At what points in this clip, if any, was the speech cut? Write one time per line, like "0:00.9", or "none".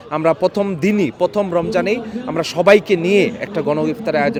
none